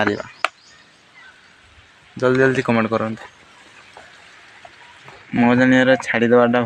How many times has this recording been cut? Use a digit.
1